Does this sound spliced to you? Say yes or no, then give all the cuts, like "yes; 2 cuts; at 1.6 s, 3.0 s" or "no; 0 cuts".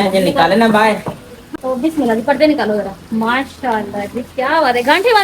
no; 0 cuts